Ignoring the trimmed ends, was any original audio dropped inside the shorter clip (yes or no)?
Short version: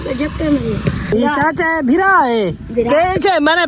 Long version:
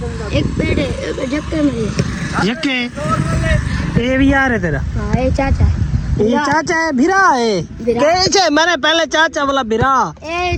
yes